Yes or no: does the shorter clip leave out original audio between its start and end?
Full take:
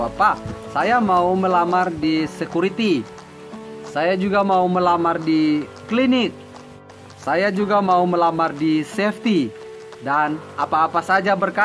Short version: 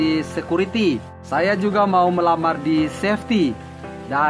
yes